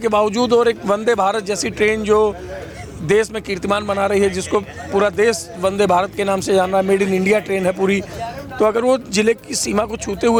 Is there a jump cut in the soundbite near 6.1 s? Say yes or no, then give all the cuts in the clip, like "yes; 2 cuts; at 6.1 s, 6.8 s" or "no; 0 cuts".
no; 0 cuts